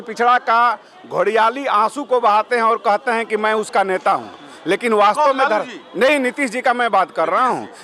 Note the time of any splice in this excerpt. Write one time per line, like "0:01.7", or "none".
none